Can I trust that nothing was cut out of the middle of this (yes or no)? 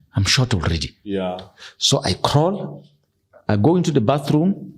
yes